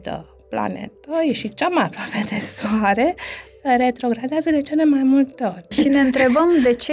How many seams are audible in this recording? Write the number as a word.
one